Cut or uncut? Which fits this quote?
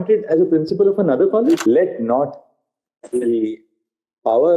cut